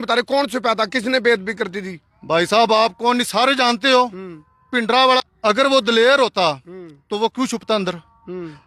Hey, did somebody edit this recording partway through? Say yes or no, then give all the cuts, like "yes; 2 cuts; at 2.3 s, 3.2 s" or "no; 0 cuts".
no; 0 cuts